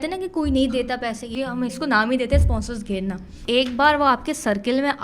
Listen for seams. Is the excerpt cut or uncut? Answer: cut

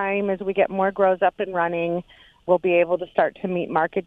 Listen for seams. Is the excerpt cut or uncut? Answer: cut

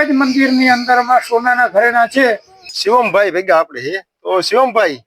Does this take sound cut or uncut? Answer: cut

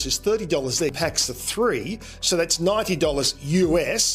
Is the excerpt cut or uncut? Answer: cut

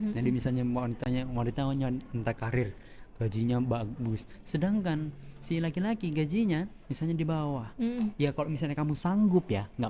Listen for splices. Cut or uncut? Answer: uncut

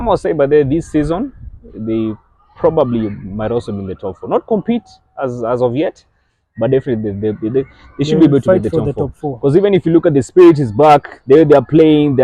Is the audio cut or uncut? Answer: uncut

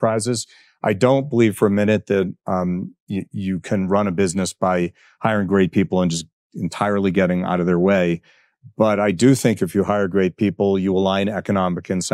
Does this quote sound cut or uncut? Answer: uncut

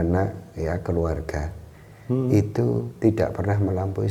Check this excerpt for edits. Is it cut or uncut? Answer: uncut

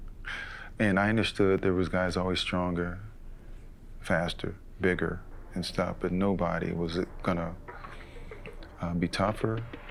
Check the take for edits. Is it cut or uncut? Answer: uncut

